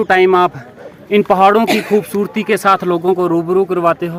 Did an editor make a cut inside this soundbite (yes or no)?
no